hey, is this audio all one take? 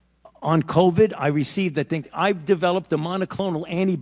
no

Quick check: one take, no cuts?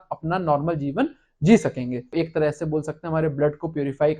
no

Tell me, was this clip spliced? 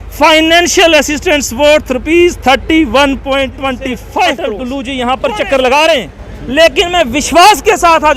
yes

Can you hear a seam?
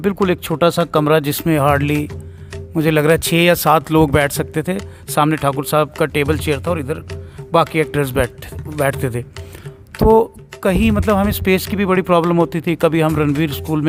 no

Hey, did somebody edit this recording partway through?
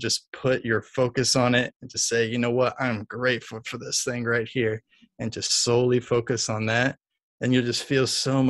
no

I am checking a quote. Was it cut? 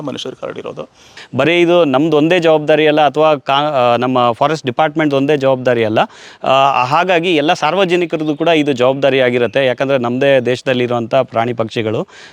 yes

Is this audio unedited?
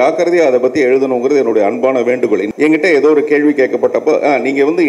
no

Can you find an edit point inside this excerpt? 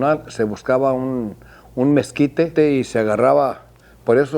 yes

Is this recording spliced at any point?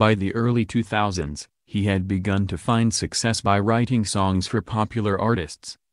yes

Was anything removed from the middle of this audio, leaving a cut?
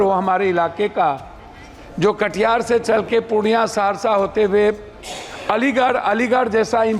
no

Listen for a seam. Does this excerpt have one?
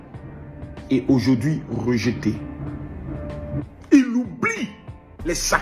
yes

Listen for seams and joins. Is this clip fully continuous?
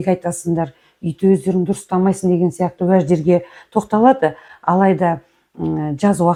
yes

